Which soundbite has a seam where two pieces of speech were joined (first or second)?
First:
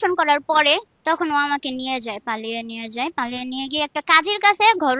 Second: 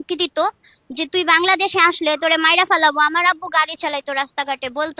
first